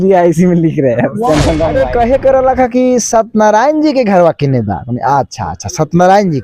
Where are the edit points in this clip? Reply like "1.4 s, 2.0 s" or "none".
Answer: 1.8 s